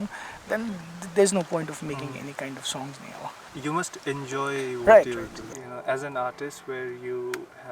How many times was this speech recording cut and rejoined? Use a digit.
2